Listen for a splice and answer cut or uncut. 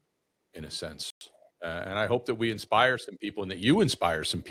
uncut